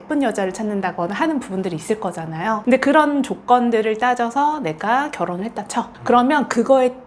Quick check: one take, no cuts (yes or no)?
yes